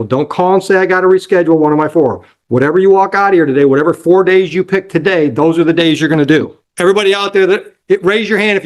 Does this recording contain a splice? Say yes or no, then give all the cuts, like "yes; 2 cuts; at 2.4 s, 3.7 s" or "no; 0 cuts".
yes; 1 cut; at 6.6 s